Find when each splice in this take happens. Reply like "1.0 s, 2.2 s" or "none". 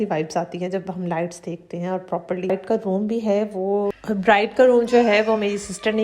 2.5 s